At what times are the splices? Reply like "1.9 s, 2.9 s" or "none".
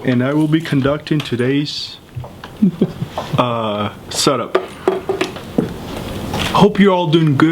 6.4 s